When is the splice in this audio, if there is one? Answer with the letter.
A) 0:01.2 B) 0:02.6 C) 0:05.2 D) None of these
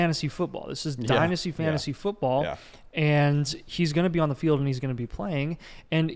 D